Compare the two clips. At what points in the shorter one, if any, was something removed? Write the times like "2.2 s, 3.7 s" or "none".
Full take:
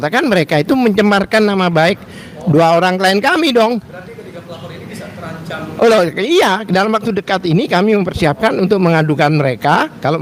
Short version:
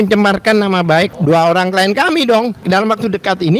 1.1 s, 2.6 s

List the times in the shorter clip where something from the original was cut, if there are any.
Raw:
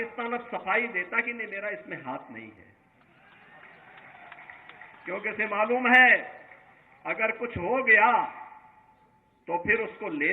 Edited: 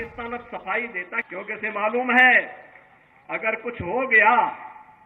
1.3 s

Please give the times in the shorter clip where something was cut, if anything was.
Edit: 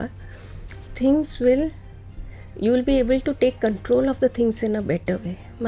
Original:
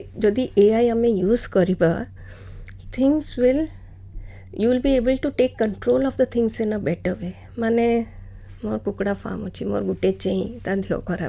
none

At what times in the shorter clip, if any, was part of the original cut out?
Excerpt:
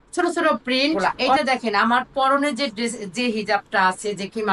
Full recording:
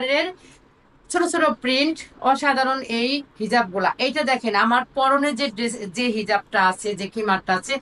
1.4 s

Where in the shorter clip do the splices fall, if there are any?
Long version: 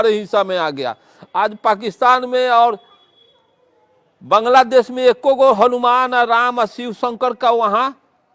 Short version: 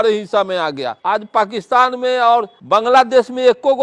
0.9 s, 2.6 s

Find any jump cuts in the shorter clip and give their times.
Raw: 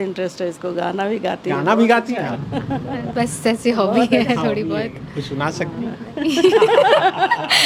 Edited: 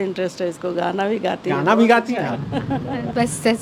none

